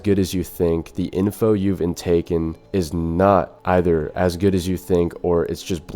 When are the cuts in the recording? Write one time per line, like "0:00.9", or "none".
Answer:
0:02.6
0:03.5